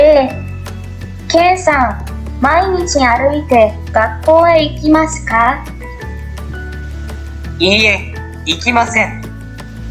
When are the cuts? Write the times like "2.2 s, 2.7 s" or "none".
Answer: none